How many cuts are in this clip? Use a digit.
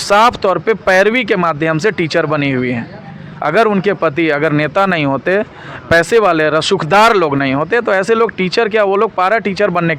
0